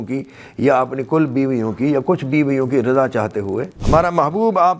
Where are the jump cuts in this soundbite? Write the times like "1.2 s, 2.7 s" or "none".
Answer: 3.7 s